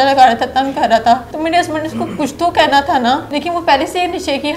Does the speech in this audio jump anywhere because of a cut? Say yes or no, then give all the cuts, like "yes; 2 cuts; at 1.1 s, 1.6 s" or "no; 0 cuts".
yes; 2 cuts; at 1.3 s, 3.3 s